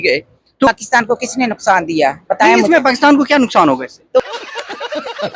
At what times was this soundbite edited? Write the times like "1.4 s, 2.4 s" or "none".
0.7 s, 4.2 s